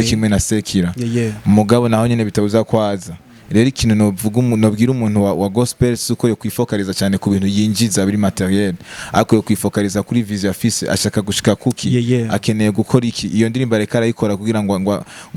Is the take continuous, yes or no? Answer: yes